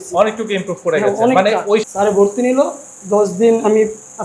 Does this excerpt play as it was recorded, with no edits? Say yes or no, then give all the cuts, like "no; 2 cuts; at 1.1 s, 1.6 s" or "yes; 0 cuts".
no; 1 cut; at 1.8 s